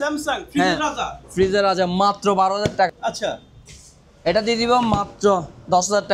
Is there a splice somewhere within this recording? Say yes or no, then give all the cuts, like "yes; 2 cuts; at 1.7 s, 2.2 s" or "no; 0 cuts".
yes; 1 cut; at 2.9 s